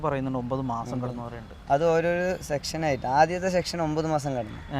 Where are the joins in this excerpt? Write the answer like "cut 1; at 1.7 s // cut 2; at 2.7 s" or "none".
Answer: none